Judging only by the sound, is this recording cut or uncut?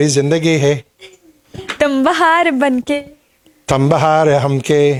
uncut